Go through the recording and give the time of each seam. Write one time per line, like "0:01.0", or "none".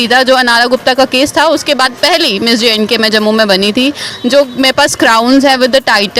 0:04.1